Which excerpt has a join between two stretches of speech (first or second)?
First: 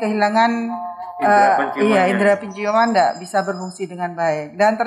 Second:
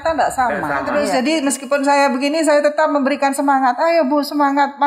second